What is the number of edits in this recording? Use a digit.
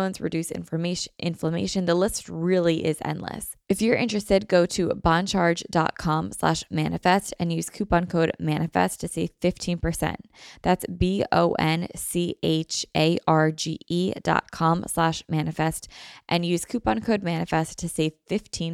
1